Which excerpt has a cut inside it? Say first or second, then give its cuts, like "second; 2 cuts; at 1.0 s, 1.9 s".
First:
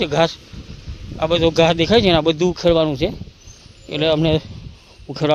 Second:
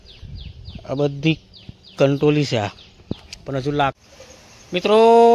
second; 1 cut; at 4.0 s